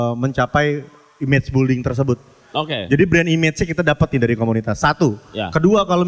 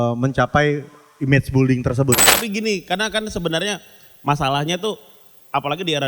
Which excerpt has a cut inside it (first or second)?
second